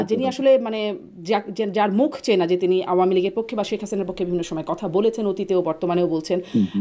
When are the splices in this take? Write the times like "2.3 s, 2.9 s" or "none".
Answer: none